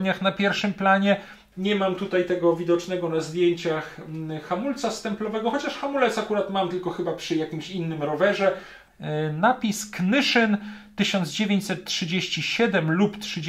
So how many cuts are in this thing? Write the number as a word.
two